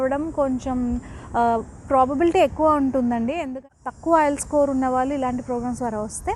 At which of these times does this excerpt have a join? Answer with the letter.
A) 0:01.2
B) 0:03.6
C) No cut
B